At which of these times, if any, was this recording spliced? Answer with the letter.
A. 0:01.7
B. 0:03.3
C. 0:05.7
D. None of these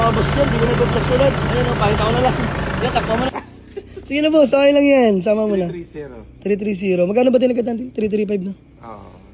B